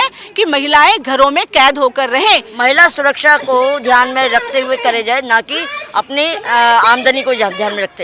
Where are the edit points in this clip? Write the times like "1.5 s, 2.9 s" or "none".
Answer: 2.5 s